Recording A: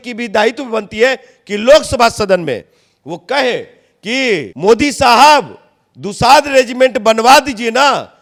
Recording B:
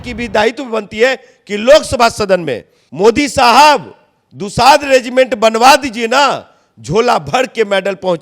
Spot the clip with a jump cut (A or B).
B